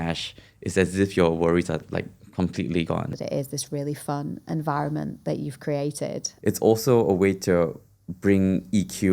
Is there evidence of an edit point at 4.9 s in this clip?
no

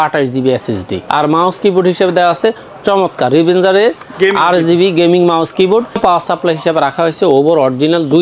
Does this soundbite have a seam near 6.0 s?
yes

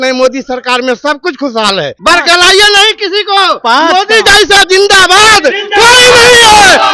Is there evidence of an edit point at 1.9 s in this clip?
yes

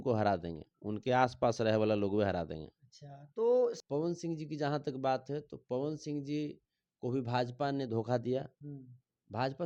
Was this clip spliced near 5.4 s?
no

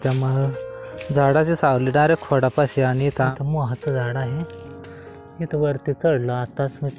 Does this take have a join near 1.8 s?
no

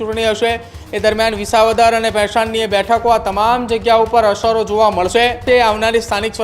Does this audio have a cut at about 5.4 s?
yes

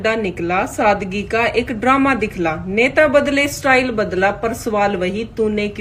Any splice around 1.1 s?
no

